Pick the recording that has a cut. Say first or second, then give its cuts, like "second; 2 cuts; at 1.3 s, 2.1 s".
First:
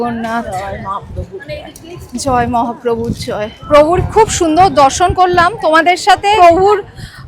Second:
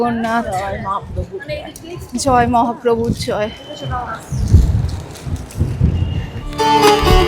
first; 2 cuts; at 3.6 s, 6.4 s